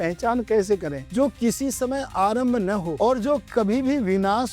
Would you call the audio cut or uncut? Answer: cut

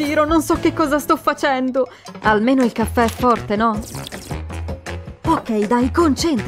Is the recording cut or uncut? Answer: uncut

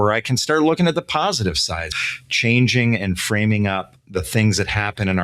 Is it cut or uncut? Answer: cut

